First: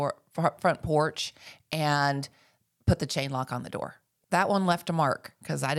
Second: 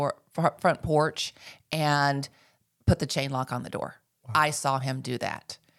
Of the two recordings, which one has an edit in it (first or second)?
first